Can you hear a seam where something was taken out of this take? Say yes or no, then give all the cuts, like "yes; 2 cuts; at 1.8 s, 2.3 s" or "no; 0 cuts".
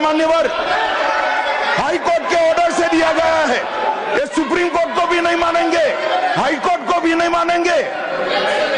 no; 0 cuts